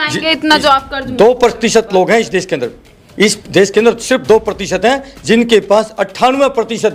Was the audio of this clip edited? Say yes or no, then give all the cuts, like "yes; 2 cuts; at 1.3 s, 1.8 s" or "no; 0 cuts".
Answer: no; 0 cuts